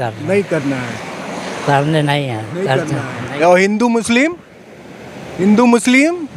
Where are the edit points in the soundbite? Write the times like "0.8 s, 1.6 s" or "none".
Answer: none